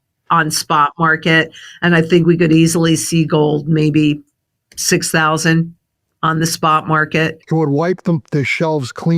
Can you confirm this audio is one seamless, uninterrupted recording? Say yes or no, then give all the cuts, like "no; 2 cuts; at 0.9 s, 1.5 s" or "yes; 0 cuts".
no; 1 cut; at 7.4 s